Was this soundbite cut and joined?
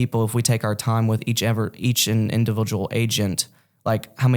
no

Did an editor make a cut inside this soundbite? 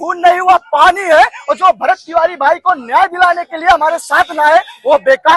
no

